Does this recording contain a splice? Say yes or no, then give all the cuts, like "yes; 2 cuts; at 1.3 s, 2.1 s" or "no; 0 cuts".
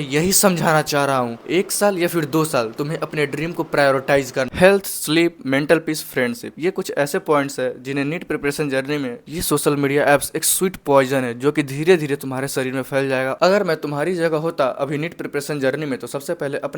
yes; 3 cuts; at 4.5 s, 9.3 s, 13.4 s